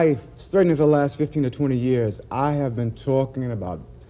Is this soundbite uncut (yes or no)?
yes